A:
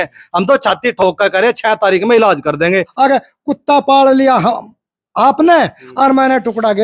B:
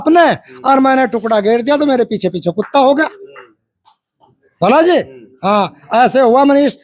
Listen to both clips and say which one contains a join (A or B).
A